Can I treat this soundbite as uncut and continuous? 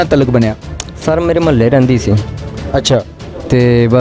yes; 0 cuts

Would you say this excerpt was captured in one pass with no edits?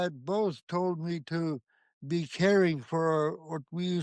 yes; 0 cuts

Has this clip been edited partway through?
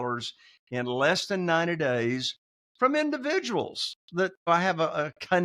yes; 1 cut; at 4.5 s

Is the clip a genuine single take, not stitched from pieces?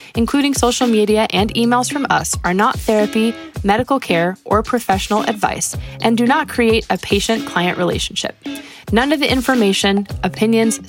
yes; 0 cuts

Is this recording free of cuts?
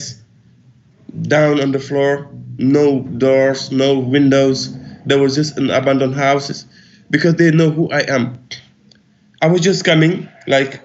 yes; 0 cuts

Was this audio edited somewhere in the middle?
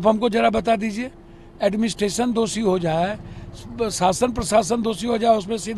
no; 0 cuts

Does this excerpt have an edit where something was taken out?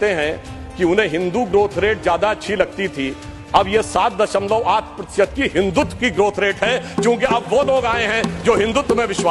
no; 0 cuts

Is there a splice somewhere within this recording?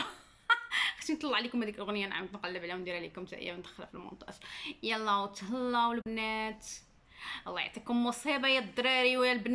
no; 0 cuts

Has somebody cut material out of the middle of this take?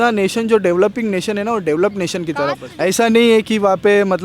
yes; 1 cut; at 2.6 s

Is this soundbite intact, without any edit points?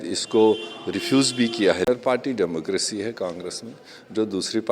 no; 1 cut; at 1.9 s

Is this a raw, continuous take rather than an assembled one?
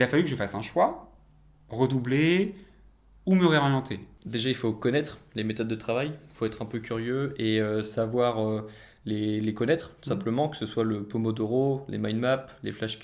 no; 1 cut; at 4.2 s

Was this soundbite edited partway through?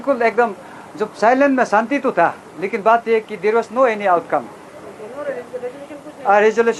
no; 0 cuts

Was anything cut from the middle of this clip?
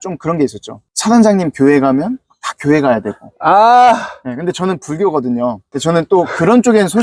no; 0 cuts

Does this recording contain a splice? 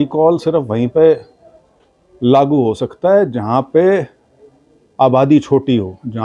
no; 0 cuts

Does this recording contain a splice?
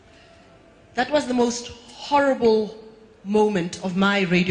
yes; 1 cut; at 1.2 s

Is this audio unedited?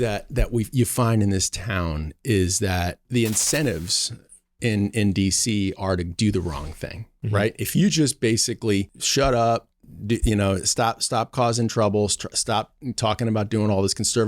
no; 2 cuts; at 3.1 s, 9.0 s

